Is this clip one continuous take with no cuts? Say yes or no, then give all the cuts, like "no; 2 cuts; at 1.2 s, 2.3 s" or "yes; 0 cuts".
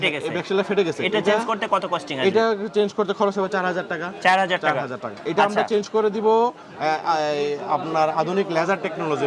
yes; 0 cuts